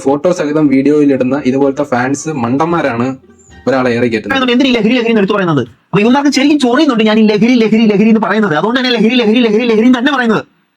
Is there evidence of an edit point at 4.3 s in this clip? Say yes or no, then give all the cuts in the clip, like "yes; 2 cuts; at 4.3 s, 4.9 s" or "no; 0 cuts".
yes; 1 cut; at 4.3 s